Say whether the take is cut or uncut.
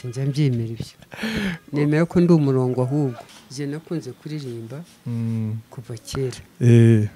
cut